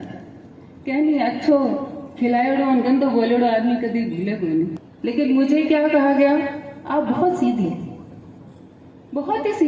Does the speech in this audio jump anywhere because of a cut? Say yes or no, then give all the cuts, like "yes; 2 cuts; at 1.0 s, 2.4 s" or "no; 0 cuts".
yes; 1 cut; at 4.8 s